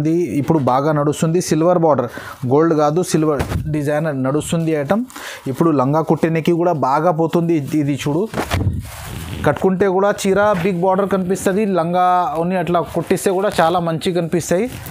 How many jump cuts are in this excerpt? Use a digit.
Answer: 0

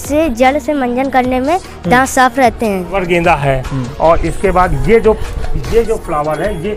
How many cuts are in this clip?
1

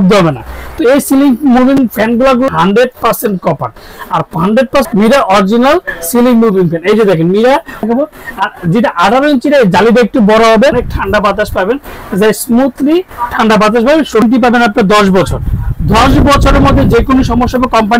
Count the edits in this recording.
5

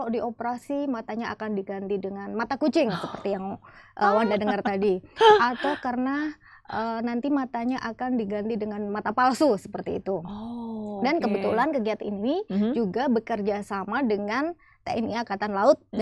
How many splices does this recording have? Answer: 0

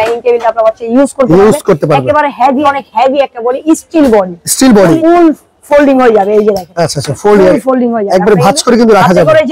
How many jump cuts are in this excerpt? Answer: 2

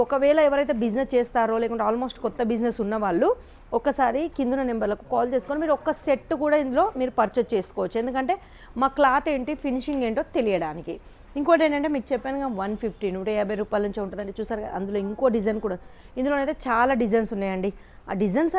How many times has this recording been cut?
0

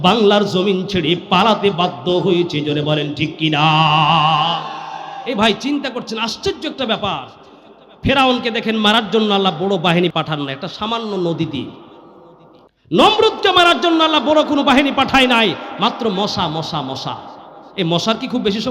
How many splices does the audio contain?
1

